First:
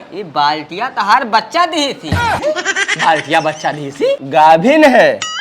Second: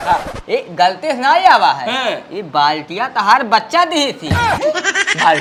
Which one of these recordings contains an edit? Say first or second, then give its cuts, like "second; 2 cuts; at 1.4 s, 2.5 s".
first; 1 cut; at 4.2 s